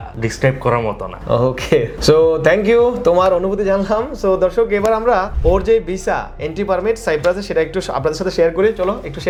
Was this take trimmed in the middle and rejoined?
no; 0 cuts

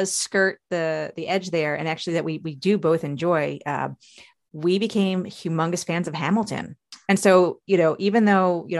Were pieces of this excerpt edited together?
yes; 1 cut; at 6.9 s

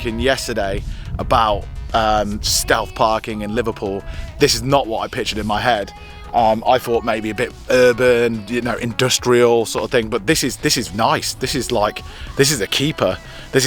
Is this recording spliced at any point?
no; 0 cuts

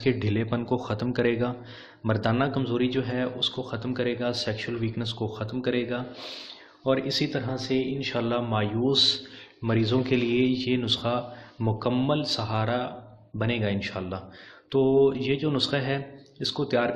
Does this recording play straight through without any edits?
yes; 0 cuts

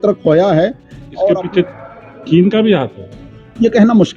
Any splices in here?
yes; 1 cut; at 1.4 s

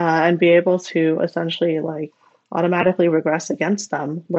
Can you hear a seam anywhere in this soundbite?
no; 0 cuts

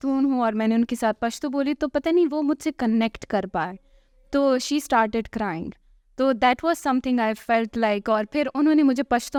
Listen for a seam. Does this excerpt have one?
no; 0 cuts

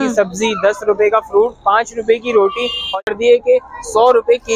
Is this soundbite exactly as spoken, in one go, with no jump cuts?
no; 1 cut; at 3.0 s

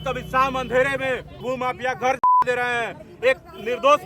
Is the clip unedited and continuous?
no; 1 cut; at 1.4 s

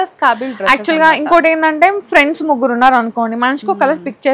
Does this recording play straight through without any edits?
yes; 0 cuts

